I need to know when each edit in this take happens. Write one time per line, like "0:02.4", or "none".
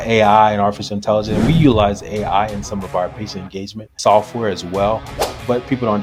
none